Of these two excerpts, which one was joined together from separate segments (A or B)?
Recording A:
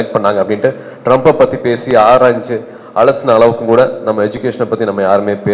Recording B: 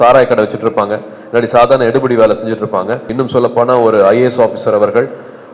B